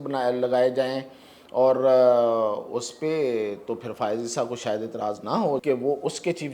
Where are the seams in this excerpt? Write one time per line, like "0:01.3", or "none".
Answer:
0:05.6